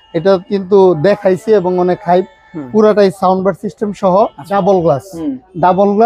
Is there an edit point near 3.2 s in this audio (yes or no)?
no